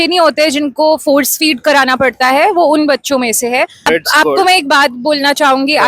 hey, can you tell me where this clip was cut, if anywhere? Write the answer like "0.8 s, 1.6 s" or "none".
3.9 s